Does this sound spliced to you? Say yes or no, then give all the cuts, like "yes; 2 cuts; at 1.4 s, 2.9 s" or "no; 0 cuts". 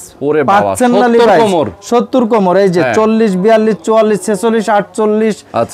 no; 0 cuts